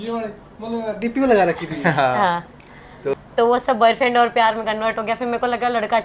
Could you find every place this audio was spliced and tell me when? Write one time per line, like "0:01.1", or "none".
0:03.2